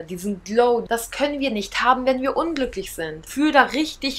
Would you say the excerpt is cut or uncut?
cut